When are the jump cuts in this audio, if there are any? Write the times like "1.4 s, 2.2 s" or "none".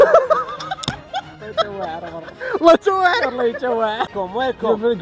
1.5 s, 4.1 s